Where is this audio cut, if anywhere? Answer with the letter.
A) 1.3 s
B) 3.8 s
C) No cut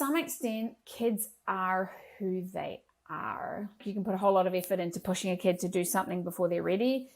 B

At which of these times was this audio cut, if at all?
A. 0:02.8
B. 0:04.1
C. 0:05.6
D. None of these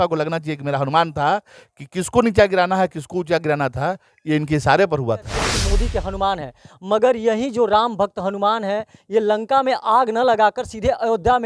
C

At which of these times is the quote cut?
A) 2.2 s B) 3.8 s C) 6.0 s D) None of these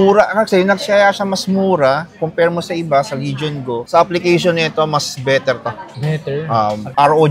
B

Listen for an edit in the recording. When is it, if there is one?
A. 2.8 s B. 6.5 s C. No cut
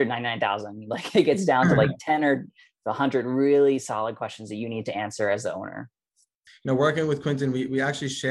B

